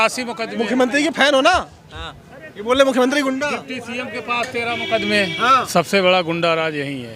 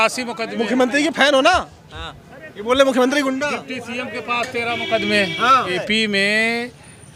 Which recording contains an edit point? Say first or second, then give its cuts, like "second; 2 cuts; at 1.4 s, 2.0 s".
first; 1 cut; at 5.6 s